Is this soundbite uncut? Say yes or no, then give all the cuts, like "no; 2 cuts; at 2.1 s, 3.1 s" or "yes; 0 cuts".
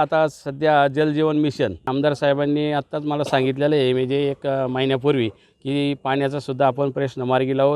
no; 1 cut; at 1.9 s